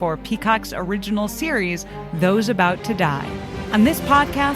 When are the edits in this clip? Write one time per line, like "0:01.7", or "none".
0:03.6